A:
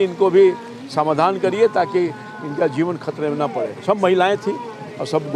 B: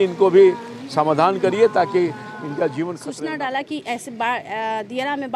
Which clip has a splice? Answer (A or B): B